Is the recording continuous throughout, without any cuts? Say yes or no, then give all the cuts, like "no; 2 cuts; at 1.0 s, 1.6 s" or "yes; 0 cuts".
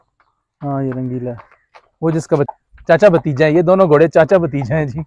no; 1 cut; at 2.5 s